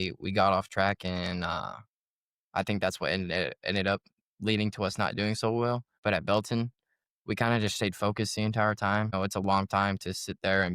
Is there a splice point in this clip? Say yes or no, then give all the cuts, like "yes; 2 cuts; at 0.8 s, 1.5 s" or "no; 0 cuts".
yes; 2 cuts; at 5.9 s, 9.1 s